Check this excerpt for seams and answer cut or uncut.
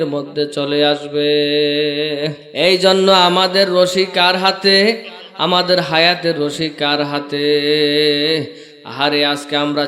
cut